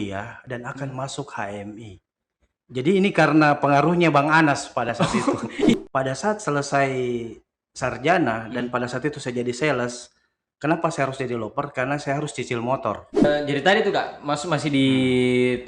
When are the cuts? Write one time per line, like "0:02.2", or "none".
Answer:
0:05.7
0:13.2